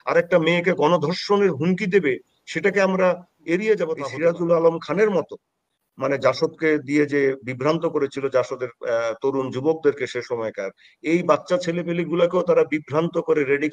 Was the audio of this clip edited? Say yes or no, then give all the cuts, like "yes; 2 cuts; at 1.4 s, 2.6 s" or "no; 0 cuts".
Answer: yes; 1 cut; at 4.1 s